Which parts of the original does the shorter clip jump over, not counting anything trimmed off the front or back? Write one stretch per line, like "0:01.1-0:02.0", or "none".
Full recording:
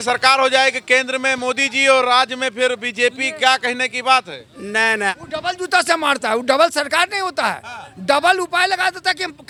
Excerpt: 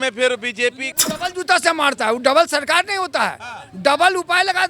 0:03.3-0:05.2

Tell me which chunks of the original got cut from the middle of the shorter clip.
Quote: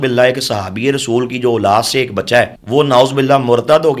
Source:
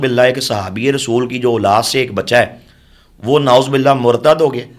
0:02.6-0:03.1

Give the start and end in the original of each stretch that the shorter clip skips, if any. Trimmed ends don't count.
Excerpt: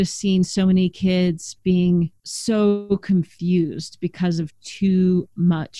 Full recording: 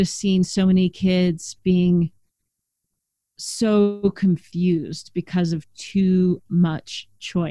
0:02.3-0:03.4

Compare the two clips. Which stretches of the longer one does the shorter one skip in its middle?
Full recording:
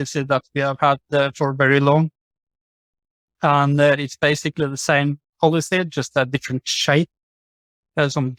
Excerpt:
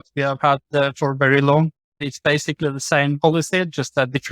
0:02.5-0:04.1
0:05.1-0:05.4

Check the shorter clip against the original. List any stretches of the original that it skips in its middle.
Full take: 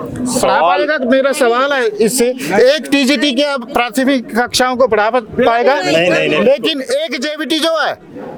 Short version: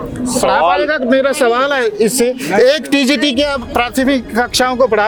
none

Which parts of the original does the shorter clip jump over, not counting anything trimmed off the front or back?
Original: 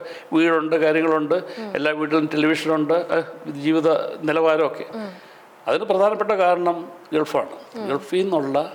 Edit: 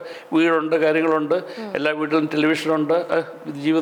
none

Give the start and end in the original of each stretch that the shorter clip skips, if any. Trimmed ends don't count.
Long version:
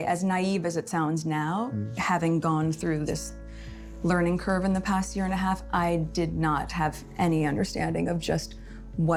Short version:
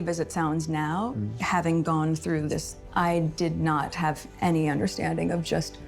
0:03.4-0:05.6

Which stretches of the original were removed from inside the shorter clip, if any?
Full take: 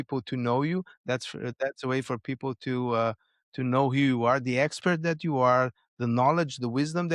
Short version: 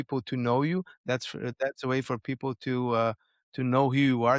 none

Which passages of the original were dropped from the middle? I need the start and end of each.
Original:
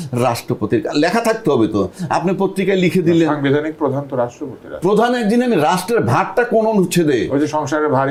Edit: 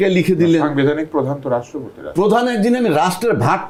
none

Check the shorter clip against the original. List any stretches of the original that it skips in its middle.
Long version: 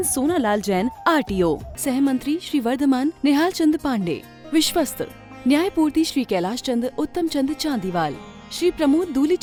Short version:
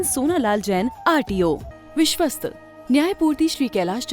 0:01.7-0:04.3

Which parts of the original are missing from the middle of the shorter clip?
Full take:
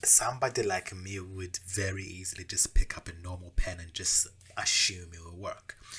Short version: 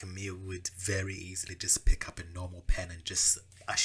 none

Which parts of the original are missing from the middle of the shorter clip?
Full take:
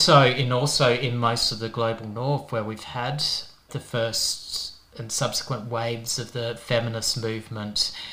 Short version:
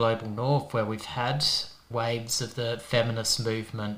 0:03.6-0:05.6

